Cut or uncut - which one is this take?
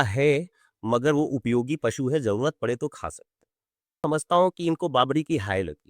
cut